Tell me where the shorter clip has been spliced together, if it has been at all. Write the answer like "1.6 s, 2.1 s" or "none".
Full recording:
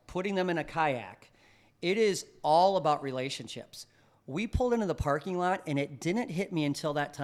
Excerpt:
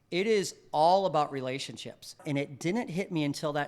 2.2 s